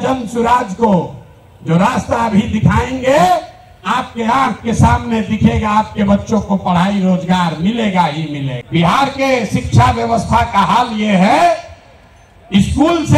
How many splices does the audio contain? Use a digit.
1